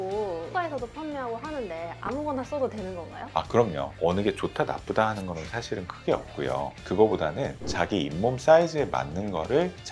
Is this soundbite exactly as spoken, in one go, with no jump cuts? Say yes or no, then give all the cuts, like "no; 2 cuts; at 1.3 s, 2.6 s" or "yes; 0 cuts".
yes; 0 cuts